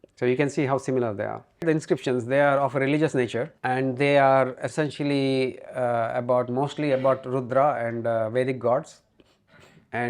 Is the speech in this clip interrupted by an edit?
yes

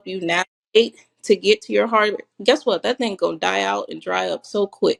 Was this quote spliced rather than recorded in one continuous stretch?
no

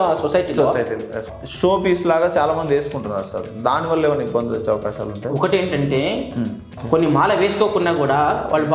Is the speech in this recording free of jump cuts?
no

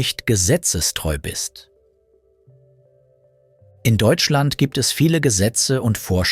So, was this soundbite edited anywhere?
yes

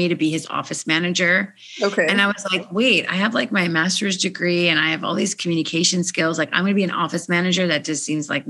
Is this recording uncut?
yes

